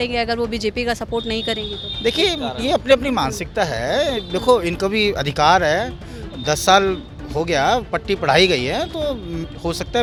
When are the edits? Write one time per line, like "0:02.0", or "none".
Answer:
none